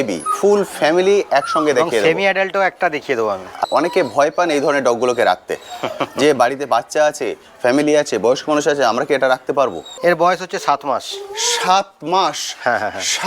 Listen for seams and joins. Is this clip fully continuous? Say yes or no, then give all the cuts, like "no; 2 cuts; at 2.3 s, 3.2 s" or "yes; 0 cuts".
no; 2 cuts; at 3.6 s, 10.0 s